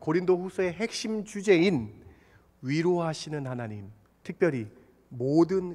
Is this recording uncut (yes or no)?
yes